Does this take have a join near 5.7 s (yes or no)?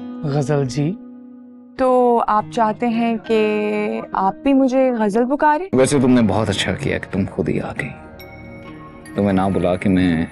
yes